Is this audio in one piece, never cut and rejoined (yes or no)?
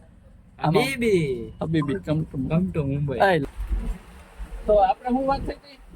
no